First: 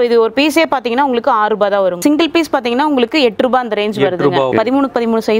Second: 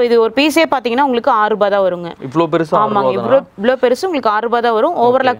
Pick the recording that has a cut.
first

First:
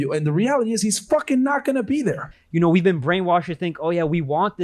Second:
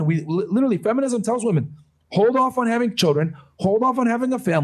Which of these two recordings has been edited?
first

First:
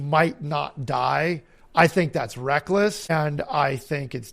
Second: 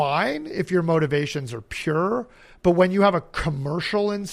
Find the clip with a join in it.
first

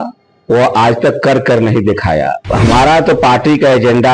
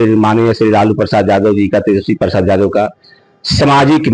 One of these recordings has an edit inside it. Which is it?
first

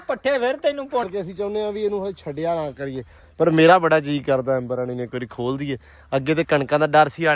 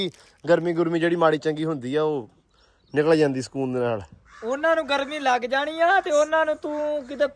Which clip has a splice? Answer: first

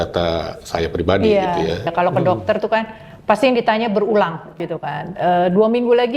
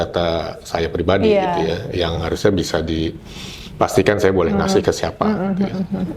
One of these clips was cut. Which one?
first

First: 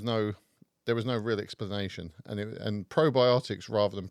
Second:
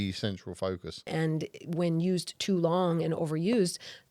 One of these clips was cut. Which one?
second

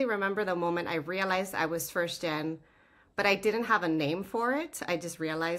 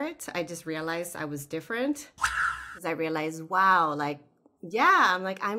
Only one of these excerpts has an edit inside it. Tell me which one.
second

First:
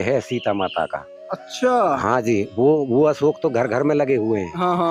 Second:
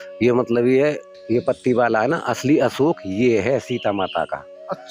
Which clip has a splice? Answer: second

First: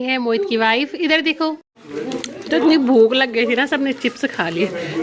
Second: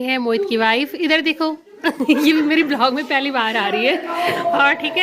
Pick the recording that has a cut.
first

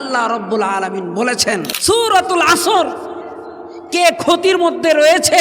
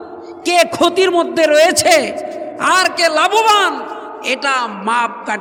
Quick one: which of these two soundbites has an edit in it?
first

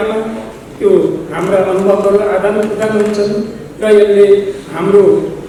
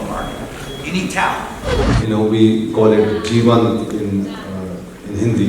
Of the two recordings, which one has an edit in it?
second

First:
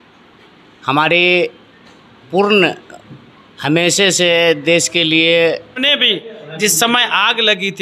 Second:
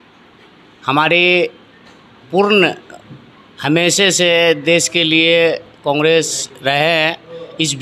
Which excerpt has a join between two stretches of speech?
first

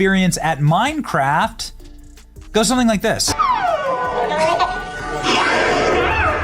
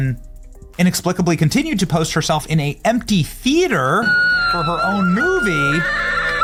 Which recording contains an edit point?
first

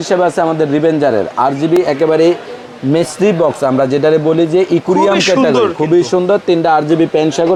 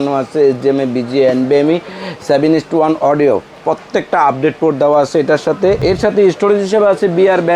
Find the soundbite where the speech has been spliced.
second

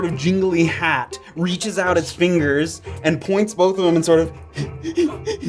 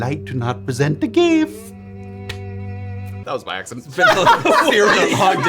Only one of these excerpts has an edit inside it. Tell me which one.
second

